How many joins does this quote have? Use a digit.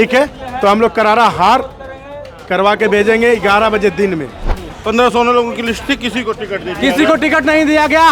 1